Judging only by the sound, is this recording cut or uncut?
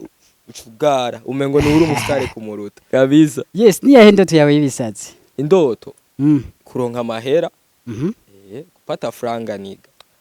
cut